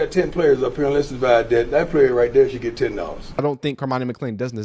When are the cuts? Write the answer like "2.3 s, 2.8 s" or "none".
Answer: 3.4 s